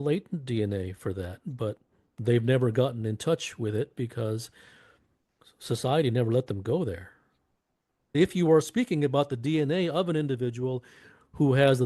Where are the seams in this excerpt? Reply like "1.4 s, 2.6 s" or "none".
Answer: 8.1 s

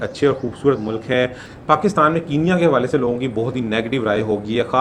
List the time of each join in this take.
1.5 s

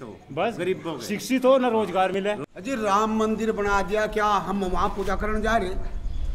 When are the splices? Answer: 2.2 s

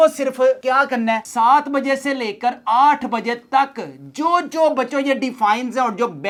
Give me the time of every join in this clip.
none

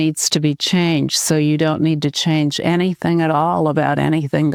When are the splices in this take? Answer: none

